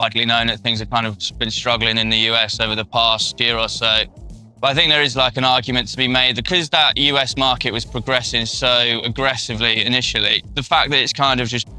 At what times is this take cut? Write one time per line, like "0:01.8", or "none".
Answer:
0:03.4
0:06.4
0:10.5

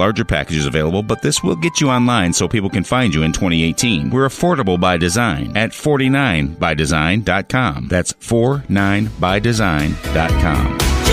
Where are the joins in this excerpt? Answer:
none

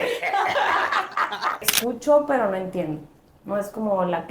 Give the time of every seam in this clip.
0:01.6

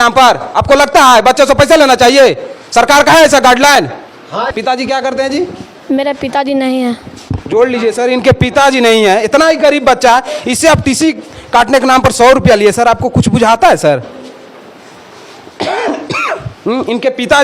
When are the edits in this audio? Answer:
0:04.5

